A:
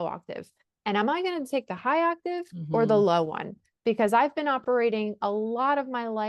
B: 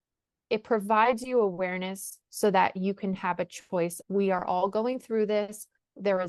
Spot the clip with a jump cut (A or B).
B